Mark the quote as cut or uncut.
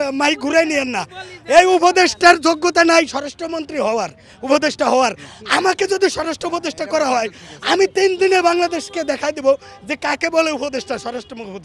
uncut